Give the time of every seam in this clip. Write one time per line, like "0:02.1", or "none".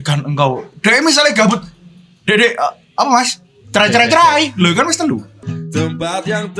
0:05.4